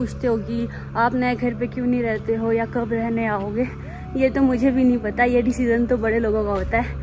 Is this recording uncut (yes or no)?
yes